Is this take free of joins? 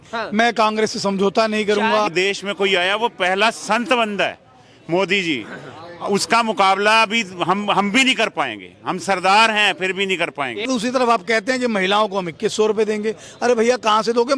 no; 2 cuts; at 2.1 s, 10.7 s

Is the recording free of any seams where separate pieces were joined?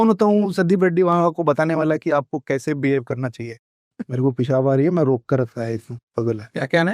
no; 1 cut; at 4.0 s

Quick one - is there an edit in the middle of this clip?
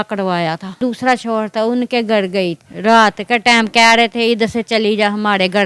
yes; 2 cuts; at 0.8 s, 2.7 s

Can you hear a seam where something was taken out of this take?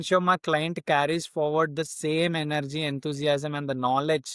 no; 0 cuts

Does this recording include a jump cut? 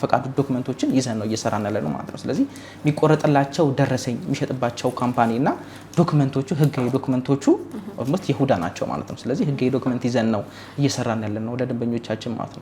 no; 0 cuts

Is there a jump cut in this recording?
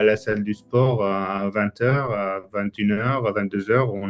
no; 0 cuts

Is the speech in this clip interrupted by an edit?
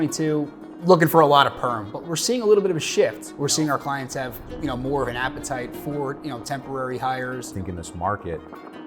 yes; 2 cuts; at 3.2 s, 7.5 s

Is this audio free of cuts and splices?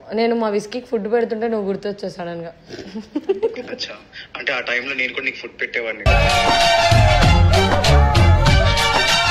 yes; 0 cuts

